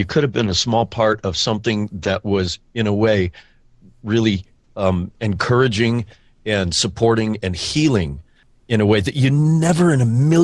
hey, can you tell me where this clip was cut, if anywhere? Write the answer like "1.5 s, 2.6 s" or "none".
none